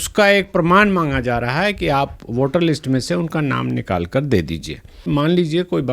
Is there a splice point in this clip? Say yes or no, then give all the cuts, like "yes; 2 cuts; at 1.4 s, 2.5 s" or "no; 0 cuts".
yes; 1 cut; at 5.0 s